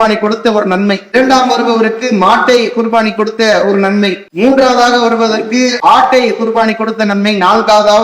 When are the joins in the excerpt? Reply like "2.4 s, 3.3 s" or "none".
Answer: 1.1 s, 4.2 s, 5.8 s